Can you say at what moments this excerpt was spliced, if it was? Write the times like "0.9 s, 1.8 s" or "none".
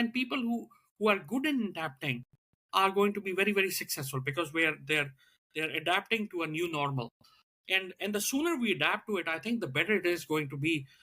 7.4 s